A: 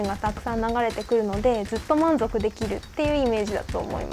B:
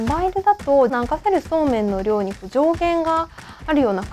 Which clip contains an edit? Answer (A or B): B